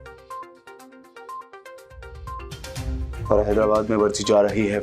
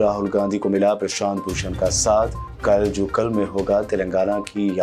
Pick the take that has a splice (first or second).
first